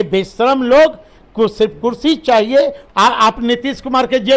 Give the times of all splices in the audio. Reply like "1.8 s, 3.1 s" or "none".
2.8 s